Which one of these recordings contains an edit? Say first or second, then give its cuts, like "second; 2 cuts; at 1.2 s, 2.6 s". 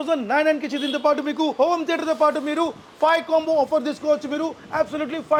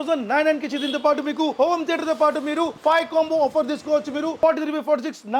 second; 2 cuts; at 2.7 s, 4.4 s